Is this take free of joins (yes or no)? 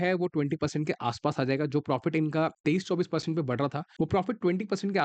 no